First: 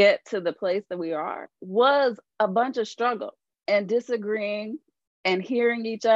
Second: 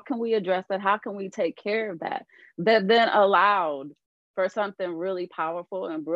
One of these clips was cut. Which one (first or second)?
first